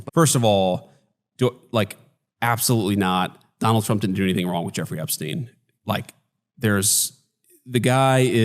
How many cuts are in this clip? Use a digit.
1